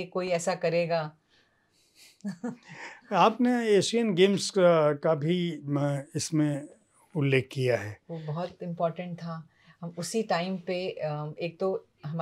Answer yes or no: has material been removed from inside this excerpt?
no